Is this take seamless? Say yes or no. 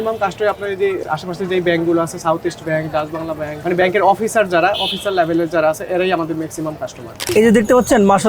no